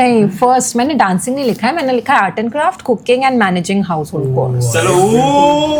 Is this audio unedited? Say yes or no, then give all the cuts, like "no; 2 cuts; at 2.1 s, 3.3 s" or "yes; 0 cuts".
yes; 0 cuts